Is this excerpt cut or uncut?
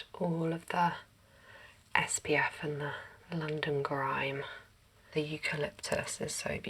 cut